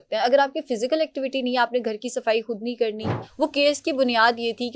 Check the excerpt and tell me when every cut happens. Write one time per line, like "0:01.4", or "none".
0:03.1